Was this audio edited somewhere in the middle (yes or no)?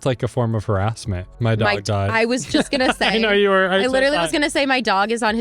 yes